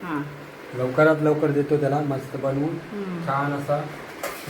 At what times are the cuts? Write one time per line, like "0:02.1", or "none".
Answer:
none